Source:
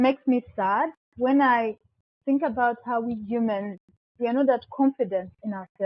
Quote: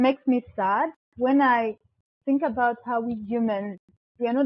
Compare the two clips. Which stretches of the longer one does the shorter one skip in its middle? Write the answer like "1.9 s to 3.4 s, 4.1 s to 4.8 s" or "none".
none

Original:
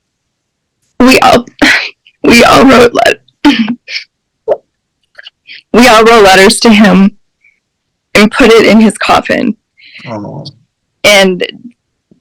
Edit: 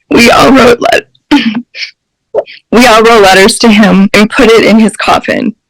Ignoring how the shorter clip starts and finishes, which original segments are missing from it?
4.7 s to 5.6 s, 7.1 s to 8.1 s

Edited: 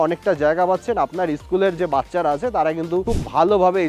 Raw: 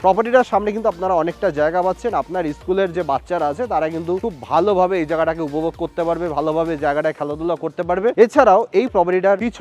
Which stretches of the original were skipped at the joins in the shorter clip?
none

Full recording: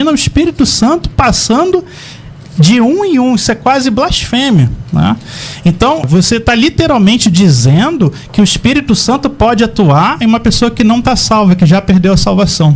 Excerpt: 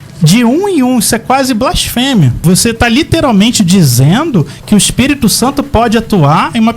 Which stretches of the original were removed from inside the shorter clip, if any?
4.7 s to 6.0 s

